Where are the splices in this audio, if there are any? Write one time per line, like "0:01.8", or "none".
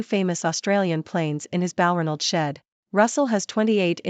0:02.7